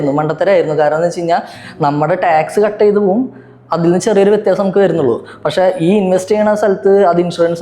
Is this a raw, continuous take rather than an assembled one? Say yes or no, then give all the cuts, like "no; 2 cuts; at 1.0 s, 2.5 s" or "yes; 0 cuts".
yes; 0 cuts